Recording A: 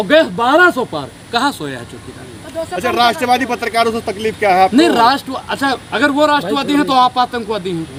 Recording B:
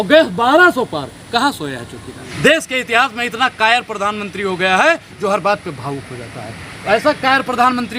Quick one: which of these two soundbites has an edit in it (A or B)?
B